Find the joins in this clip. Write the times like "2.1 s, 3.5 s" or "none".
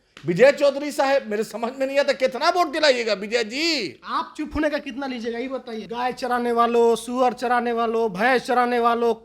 5.7 s